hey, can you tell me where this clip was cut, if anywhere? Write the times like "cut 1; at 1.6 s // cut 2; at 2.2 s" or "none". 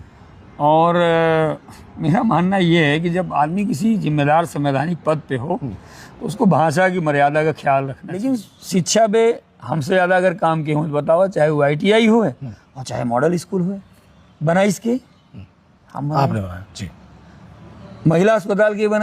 cut 1; at 8.2 s